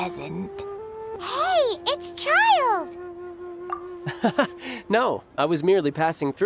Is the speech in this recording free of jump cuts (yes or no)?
no